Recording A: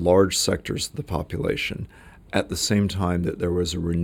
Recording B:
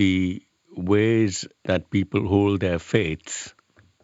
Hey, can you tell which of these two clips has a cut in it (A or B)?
B